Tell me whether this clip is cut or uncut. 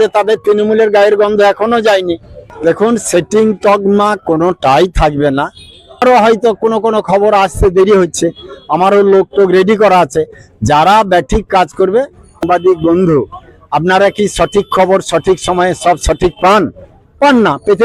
cut